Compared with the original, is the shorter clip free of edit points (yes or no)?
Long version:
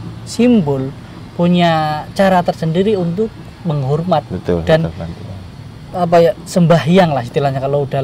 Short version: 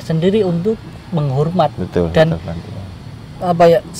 yes